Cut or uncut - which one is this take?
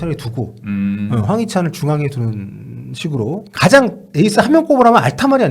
cut